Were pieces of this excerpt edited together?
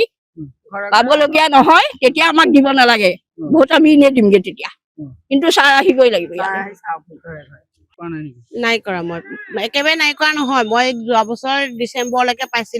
no; 0 cuts

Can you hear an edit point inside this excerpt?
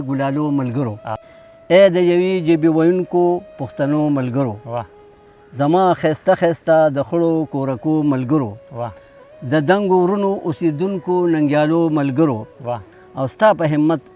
yes; 1 cut; at 1.1 s

